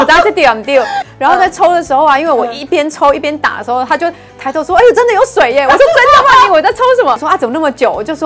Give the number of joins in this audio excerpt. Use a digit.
2